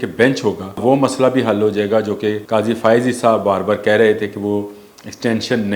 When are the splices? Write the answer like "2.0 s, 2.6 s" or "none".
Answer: 0.8 s, 2.4 s